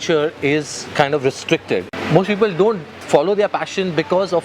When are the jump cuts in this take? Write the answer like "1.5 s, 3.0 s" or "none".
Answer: 1.9 s